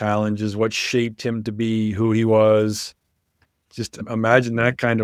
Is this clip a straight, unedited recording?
no; 1 cut; at 4.0 s

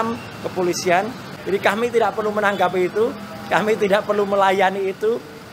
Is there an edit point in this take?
no; 0 cuts

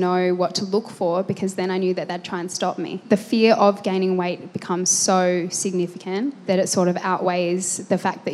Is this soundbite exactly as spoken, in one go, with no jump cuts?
no; 1 cut; at 3.0 s

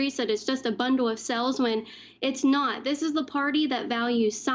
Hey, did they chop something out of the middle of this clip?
no; 0 cuts

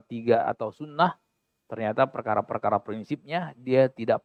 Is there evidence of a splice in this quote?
no; 0 cuts

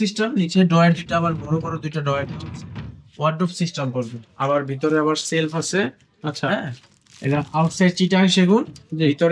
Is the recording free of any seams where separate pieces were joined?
yes; 0 cuts

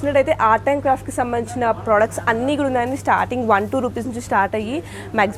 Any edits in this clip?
no; 0 cuts

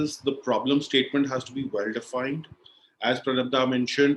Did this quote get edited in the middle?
no; 0 cuts

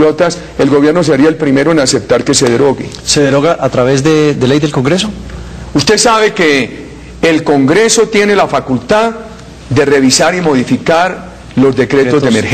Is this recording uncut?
yes; 0 cuts

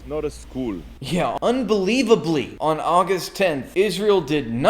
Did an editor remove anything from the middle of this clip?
yes; 3 cuts; at 1.1 s, 2.5 s, 3.6 s

